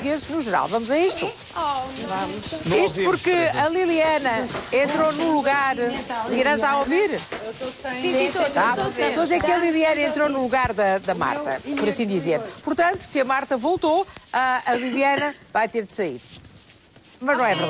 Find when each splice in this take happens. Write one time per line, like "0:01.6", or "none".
0:16.2